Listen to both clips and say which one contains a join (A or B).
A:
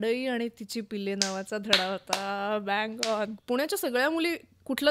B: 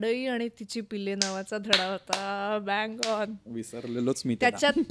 A